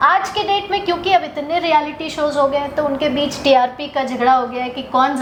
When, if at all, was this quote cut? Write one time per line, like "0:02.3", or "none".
none